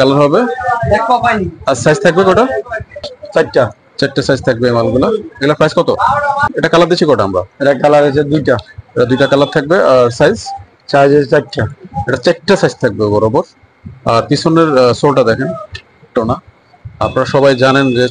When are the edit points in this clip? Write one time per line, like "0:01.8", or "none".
0:03.2
0:06.5
0:16.2